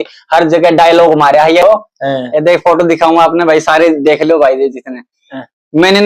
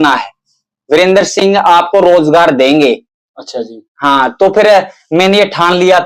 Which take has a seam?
first; 1 cut; at 1.6 s

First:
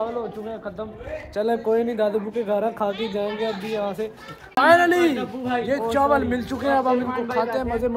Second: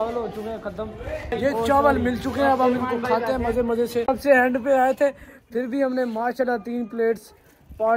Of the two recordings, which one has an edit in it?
second; 2 cuts; at 1.3 s, 4.1 s

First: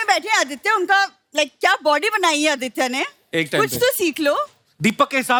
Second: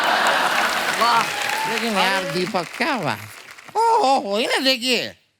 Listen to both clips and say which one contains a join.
second; 1 cut; at 1.8 s

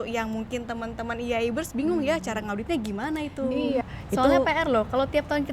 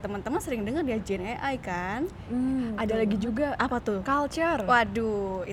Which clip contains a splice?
first; 1 cut; at 3.8 s

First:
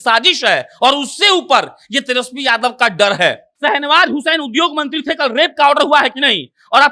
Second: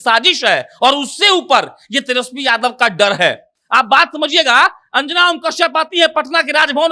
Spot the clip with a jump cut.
first; 1 cut; at 3.5 s

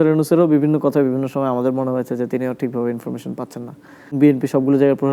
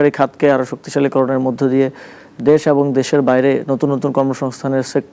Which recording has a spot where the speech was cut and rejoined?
first; 1 cut; at 4.1 s

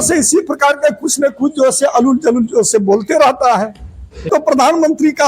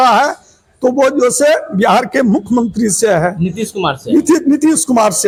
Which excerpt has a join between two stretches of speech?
first; 1 cut; at 4.3 s

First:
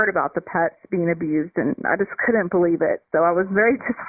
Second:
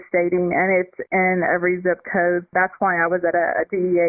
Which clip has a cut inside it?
second; 1 cut; at 2.5 s

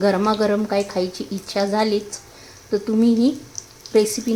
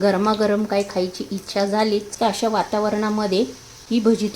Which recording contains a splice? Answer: second; 2 cuts; at 2.1 s, 3.4 s

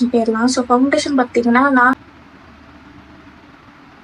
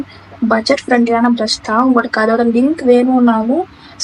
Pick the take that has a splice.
first; 1 cut; at 2.0 s

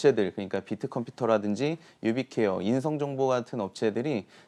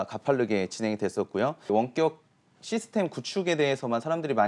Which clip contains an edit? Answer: second; 1 cut; at 1.7 s

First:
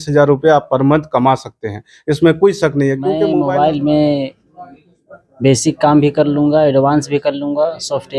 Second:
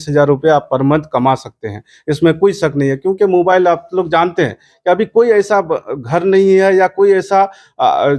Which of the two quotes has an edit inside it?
first; 1 cut; at 3.2 s

